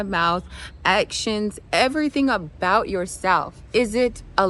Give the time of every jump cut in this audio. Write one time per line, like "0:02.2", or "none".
none

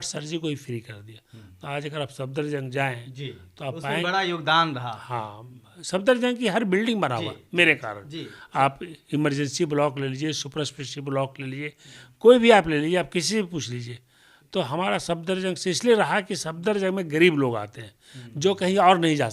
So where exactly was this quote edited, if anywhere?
none

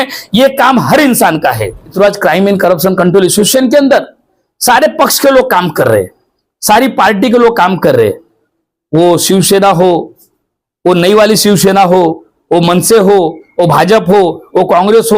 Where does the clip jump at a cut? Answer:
0:01.9

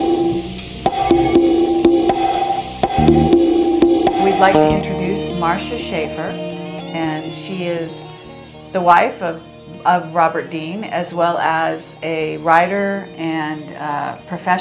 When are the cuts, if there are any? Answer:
0:02.1

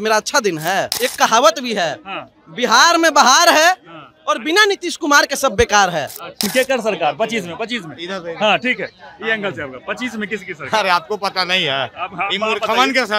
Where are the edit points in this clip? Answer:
0:00.9
0:06.5

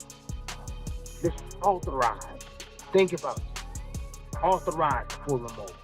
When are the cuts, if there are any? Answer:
0:00.9

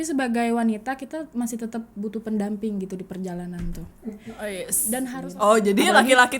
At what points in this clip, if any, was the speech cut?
0:05.2

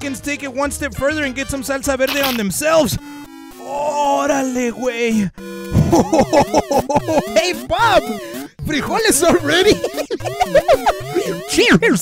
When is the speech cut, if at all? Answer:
none

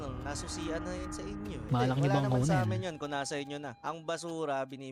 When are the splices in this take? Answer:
0:01.6

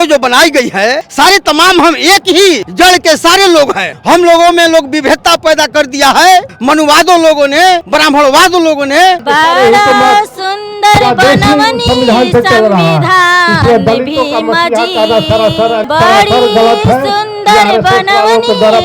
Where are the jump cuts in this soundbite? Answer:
0:01.0
0:02.7
0:03.9
0:06.5
0:07.9
0:09.2

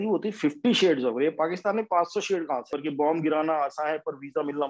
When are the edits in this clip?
0:02.7

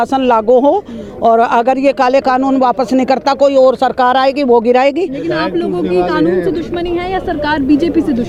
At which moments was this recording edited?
none

